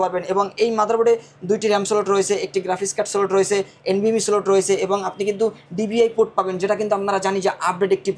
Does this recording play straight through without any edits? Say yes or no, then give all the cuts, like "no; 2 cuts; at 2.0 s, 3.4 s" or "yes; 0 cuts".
yes; 0 cuts